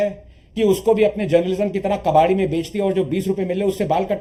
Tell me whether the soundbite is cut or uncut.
uncut